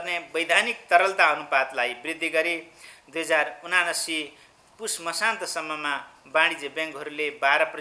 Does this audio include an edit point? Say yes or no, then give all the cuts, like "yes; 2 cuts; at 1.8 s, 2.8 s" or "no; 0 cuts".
no; 0 cuts